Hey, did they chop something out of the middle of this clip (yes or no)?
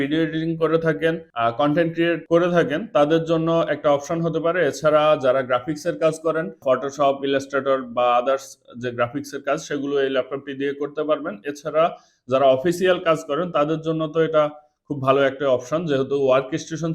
yes